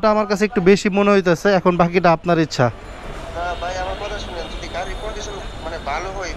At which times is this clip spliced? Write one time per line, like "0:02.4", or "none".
none